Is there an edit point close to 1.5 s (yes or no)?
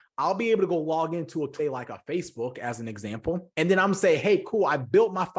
yes